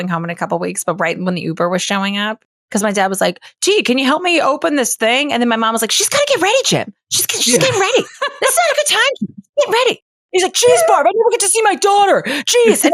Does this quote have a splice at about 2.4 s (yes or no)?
yes